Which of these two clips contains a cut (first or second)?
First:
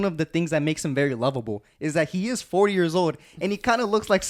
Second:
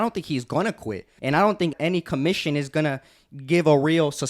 second